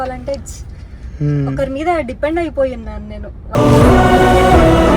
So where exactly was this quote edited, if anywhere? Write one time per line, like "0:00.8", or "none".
0:01.4